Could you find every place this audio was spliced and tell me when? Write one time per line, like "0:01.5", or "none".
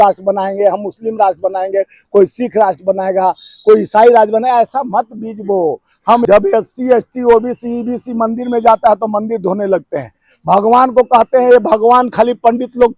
0:06.2